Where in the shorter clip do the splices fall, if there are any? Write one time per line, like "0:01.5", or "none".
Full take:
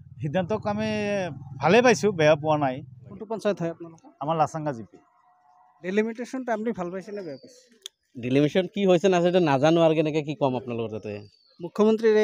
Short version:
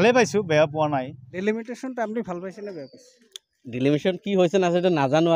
0:01.2

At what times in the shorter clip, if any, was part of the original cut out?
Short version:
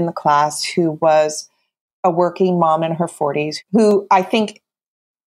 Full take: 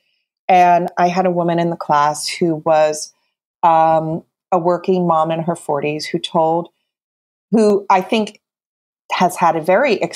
0:01.8
0:03.6

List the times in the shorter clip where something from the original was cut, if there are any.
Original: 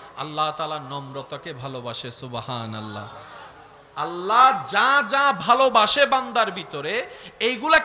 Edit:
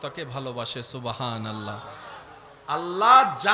none

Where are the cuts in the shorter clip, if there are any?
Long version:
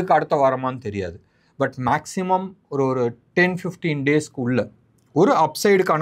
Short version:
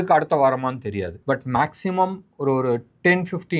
0:01.1

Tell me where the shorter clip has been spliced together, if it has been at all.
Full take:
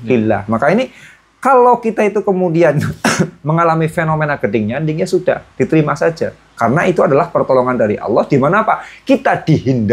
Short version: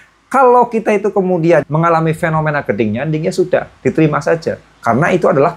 0:01.7

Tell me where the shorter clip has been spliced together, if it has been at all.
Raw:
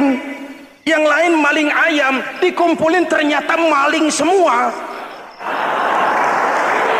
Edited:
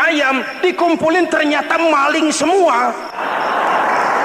0:03.1

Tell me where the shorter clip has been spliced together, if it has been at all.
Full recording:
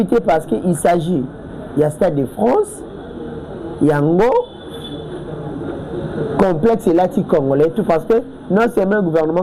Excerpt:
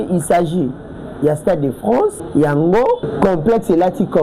0:02.2
0:03.1

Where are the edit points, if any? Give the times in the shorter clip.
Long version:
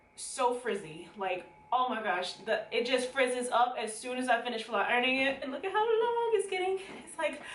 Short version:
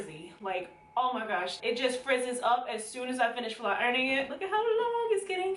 0:01.6
0:04.3

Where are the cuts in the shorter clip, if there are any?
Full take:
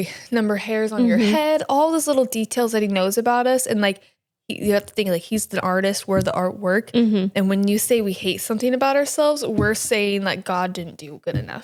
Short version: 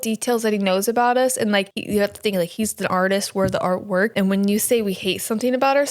0:01.8
0:04.1

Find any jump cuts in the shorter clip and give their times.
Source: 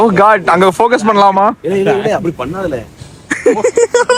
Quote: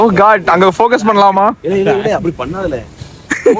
none

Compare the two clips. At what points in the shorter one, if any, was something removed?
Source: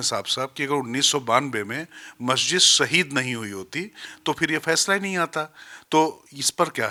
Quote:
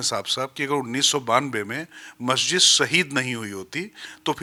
none

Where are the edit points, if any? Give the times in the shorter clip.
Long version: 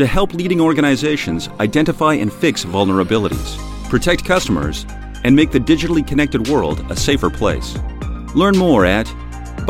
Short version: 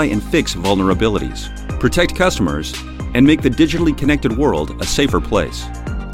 none

